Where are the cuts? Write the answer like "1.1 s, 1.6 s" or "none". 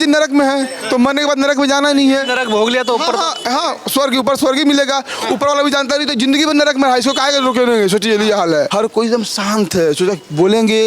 8.7 s